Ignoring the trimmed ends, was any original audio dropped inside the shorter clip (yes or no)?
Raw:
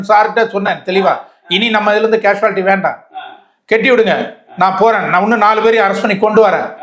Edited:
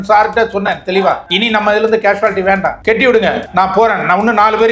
yes